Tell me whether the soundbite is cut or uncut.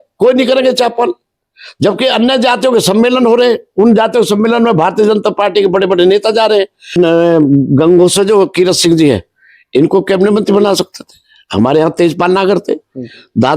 cut